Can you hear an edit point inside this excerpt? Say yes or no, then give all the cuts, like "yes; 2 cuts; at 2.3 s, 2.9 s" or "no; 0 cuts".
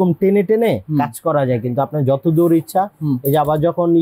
no; 0 cuts